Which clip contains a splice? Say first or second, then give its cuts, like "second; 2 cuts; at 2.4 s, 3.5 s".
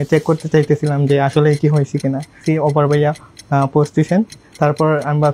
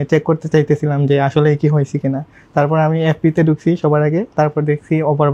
first; 1 cut; at 2.4 s